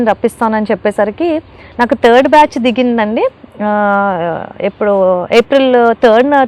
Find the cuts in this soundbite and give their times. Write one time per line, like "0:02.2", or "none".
none